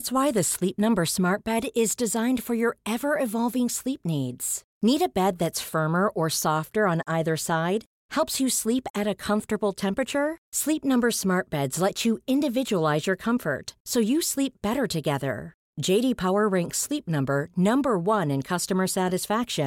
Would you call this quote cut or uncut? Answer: uncut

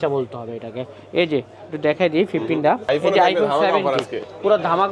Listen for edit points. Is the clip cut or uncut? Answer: cut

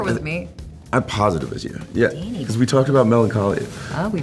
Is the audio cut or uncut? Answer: uncut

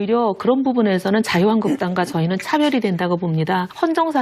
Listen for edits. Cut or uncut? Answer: cut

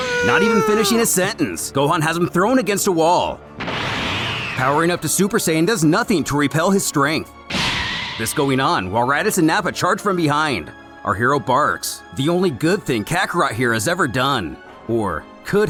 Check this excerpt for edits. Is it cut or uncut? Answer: uncut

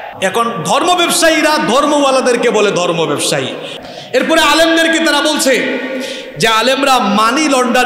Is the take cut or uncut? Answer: cut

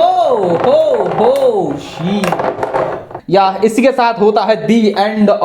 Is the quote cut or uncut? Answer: cut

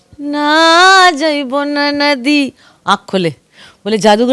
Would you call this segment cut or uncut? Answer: uncut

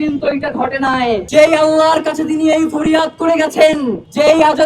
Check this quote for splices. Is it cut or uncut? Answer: cut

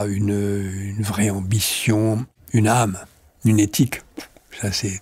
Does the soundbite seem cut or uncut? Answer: cut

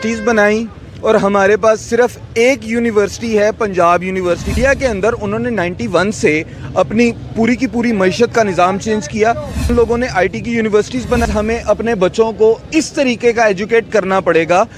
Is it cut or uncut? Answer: cut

